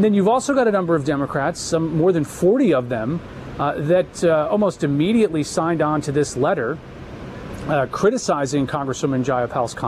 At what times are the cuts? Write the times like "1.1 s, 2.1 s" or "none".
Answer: none